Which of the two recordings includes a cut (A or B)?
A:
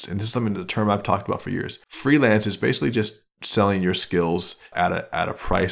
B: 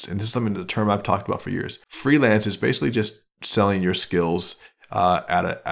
A